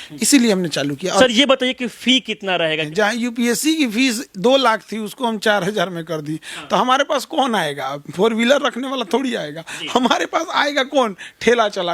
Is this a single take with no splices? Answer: no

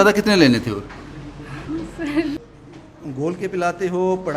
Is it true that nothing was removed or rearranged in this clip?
no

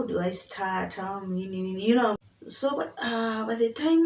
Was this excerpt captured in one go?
no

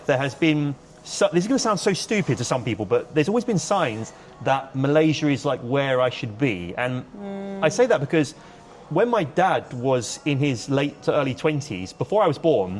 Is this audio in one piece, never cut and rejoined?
yes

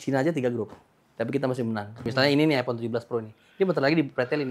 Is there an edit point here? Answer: yes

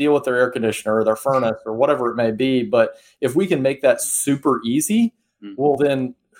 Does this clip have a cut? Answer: no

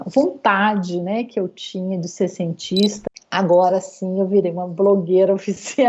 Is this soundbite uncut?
no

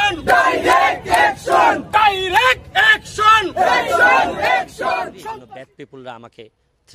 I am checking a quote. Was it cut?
yes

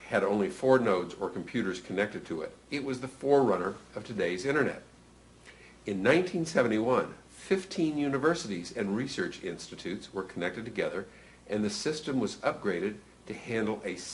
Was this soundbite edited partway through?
no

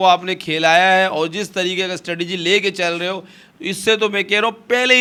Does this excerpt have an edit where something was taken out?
no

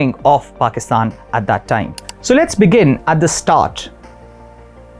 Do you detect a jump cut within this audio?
no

